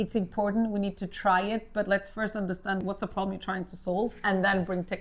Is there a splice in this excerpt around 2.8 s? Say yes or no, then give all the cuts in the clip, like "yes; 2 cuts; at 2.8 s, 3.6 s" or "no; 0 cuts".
yes; 1 cut; at 2.8 s